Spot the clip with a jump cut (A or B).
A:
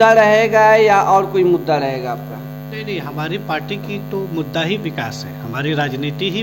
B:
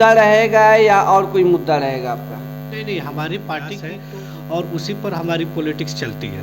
B